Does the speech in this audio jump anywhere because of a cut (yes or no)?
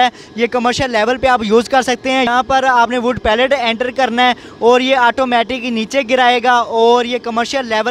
yes